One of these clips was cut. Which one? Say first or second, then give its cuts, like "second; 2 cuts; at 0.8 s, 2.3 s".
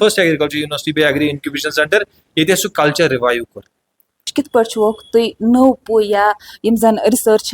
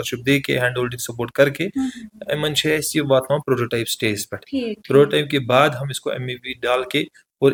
first; 1 cut; at 4.3 s